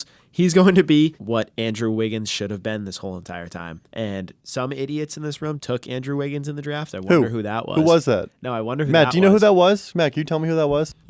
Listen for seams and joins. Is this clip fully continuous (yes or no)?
no